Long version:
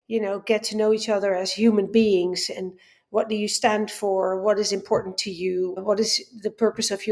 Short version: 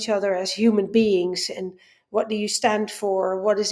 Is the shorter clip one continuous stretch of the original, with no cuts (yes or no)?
yes